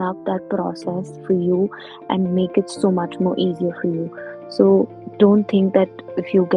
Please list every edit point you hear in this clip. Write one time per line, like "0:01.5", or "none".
none